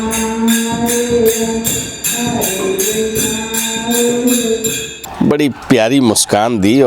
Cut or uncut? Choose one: cut